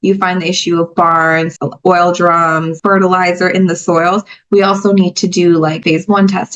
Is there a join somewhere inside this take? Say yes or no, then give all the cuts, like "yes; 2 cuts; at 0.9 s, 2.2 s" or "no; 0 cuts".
yes; 3 cuts; at 1.6 s, 2.7 s, 5.8 s